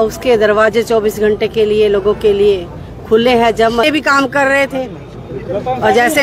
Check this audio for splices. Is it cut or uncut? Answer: cut